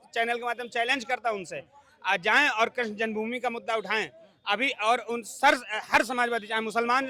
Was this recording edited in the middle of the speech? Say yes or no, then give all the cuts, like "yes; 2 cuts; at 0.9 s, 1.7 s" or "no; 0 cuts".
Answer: no; 0 cuts